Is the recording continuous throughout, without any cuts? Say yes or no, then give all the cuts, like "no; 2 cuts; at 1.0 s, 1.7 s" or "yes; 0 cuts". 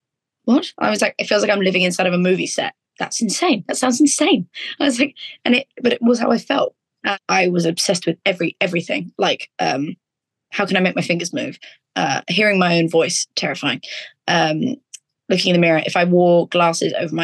no; 1 cut; at 7.1 s